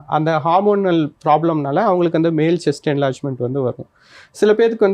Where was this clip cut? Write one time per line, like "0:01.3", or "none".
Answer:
none